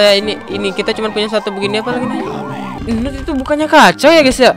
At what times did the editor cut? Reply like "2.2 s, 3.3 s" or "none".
2.7 s